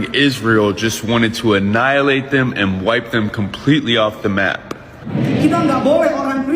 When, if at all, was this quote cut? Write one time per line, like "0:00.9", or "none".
0:05.0